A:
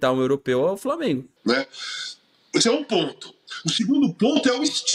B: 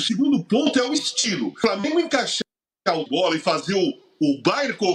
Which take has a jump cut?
A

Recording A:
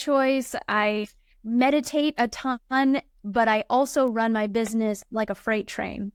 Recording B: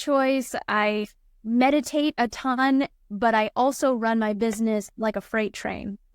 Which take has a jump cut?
B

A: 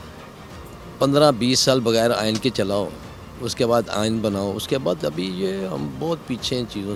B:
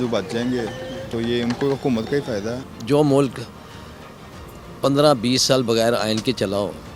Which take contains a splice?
B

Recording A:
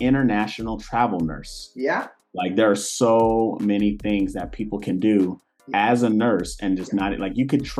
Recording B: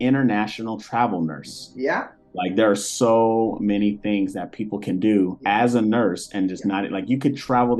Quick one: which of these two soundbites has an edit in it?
B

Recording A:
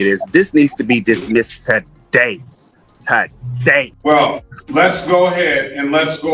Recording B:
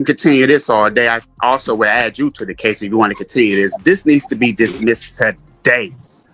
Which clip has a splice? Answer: A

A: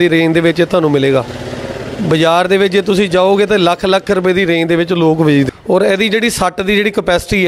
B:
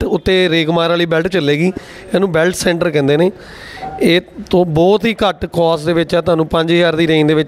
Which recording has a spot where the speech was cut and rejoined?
A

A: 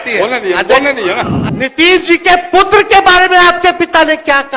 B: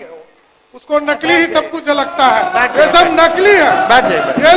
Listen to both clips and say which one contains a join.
A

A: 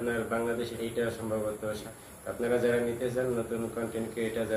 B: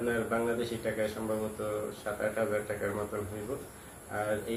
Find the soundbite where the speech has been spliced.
A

